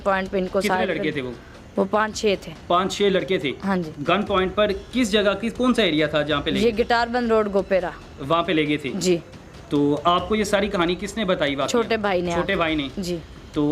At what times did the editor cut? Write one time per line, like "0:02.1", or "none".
none